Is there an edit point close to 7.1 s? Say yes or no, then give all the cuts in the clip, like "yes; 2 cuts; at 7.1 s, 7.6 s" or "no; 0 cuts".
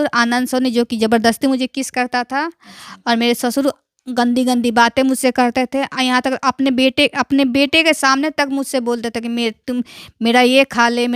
no; 0 cuts